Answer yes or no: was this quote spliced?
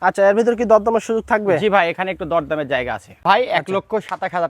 yes